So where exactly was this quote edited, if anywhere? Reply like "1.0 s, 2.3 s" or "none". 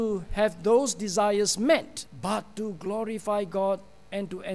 2.0 s